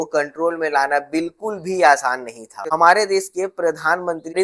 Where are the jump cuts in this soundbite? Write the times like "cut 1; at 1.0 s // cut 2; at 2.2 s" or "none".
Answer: cut 1; at 2.7 s